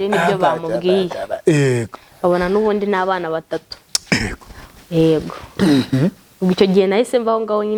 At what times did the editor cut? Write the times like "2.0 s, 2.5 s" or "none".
none